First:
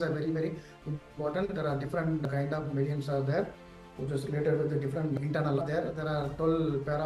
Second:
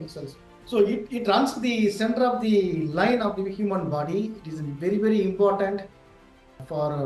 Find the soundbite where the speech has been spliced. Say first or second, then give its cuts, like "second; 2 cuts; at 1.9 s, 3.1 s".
first; 1 cut; at 5.6 s